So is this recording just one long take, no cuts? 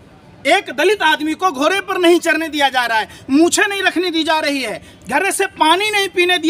yes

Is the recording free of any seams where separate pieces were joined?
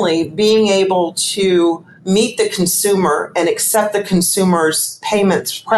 no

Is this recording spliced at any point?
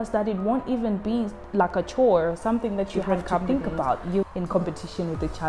yes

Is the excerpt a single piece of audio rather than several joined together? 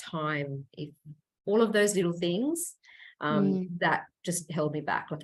yes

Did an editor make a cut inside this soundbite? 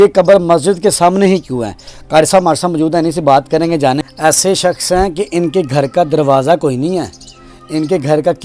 yes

